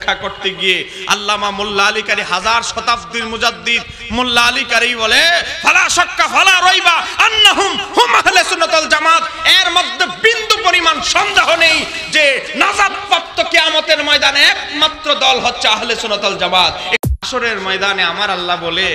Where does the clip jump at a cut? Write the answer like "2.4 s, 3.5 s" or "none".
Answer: 17.1 s

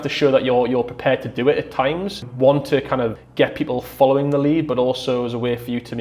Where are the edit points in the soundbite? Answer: 2.3 s, 3.2 s

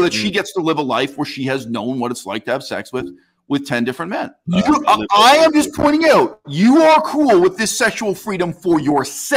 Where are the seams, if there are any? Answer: 4.4 s

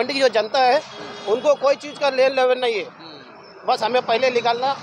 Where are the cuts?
none

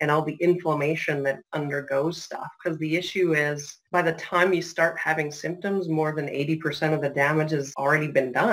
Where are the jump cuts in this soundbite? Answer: 3.7 s, 7.7 s

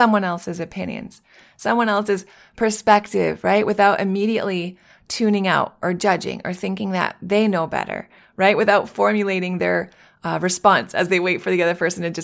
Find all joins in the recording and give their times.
none

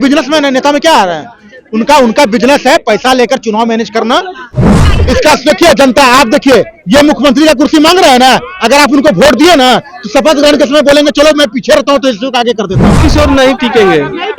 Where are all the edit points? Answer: 4.9 s, 13.0 s

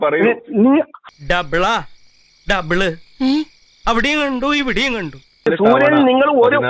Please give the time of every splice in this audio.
1.1 s, 5.5 s

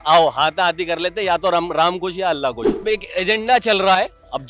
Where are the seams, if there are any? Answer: 2.8 s

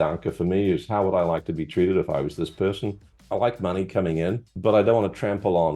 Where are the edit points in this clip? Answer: 3.1 s, 4.5 s

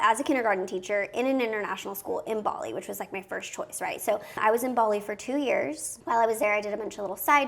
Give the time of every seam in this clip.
4.2 s

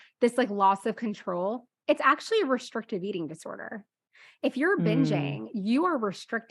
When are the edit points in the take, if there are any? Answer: none

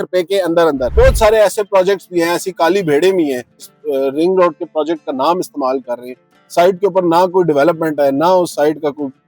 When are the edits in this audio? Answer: 0.9 s, 3.7 s

